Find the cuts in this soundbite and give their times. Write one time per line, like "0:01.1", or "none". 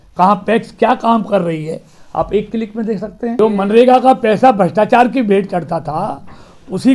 0:03.3

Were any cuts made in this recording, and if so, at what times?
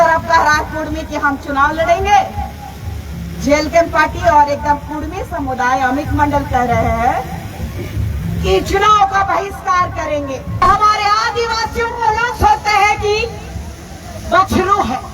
0:10.6

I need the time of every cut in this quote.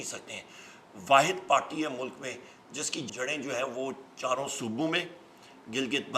0:03.1

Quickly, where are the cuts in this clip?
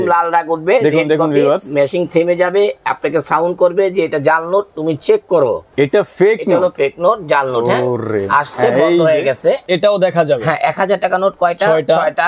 0:05.7
0:09.6

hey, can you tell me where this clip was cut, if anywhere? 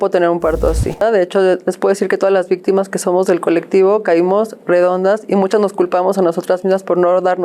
0:01.0

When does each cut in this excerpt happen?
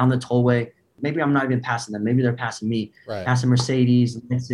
0:01.0

